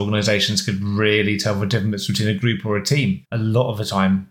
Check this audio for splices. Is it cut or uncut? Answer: uncut